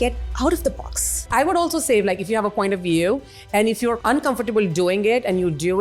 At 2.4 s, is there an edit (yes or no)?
no